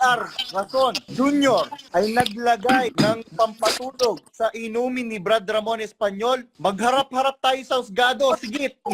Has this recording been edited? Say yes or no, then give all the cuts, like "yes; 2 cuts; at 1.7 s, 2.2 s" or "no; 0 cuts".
yes; 4 cuts; at 1.1 s, 1.8 s, 2.9 s, 6.5 s